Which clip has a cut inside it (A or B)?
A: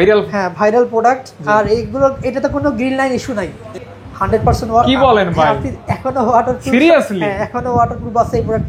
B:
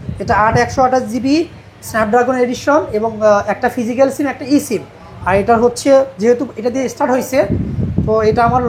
A